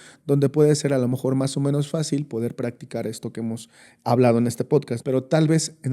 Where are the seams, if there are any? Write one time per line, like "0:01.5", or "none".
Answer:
0:04.9